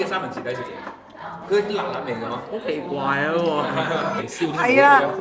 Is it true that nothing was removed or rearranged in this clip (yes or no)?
no